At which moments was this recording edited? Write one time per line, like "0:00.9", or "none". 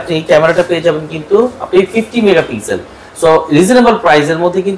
none